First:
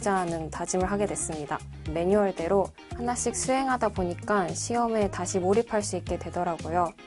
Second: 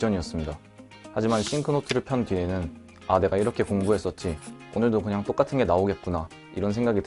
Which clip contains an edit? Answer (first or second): first